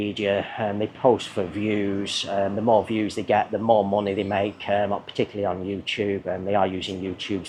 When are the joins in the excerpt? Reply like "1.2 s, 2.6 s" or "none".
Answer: none